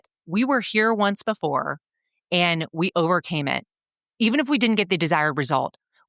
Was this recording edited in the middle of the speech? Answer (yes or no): no